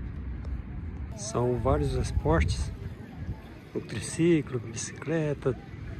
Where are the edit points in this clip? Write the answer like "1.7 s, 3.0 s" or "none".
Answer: 1.1 s